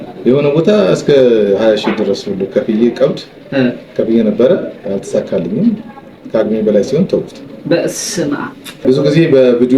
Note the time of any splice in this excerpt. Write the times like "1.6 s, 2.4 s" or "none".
8.8 s